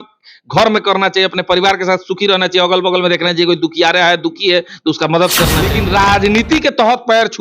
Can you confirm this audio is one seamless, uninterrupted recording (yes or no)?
no